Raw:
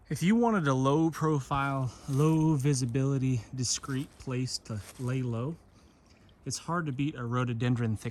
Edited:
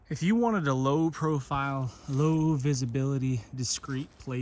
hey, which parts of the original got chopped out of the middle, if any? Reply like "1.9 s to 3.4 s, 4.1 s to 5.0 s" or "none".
none

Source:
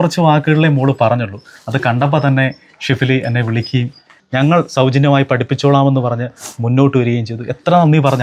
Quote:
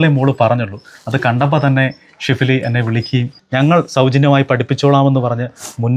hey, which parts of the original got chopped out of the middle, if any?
4.0 s to 4.2 s

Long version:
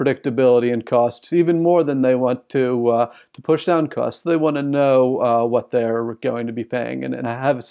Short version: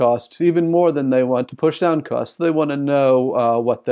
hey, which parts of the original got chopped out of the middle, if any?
2.4 s to 3.4 s

